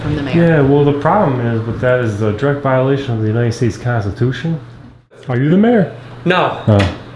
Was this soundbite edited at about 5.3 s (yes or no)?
yes